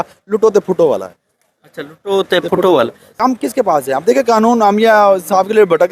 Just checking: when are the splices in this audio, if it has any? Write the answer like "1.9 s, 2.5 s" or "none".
3.2 s